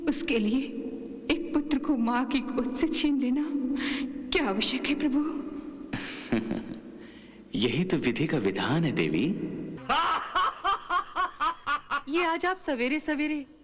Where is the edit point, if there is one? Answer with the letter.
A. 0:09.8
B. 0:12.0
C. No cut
A